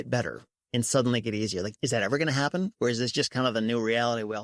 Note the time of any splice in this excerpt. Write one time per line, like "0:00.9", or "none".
0:01.7